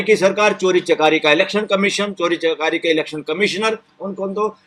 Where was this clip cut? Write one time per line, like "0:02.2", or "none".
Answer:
none